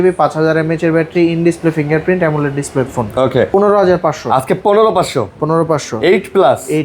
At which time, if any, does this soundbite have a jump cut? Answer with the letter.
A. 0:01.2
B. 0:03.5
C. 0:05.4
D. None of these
B